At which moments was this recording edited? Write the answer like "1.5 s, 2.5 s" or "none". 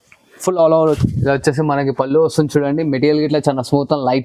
1.0 s